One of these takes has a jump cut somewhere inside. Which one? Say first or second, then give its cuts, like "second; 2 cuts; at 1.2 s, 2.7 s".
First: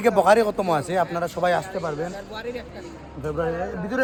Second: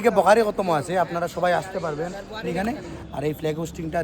second; 1 cut; at 2.5 s